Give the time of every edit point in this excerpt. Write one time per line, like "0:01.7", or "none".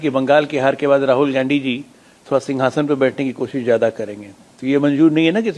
none